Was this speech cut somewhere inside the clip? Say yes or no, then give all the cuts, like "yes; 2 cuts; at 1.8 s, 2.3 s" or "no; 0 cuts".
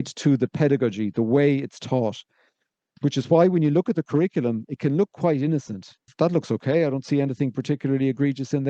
yes; 1 cut; at 6.1 s